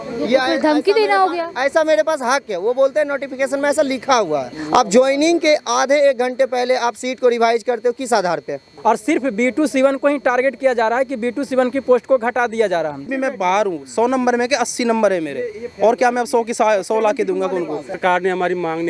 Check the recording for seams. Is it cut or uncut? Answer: cut